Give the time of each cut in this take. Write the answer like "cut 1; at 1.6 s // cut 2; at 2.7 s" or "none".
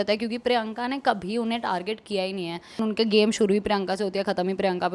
cut 1; at 2.8 s